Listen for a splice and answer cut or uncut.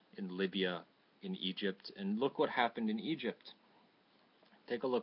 cut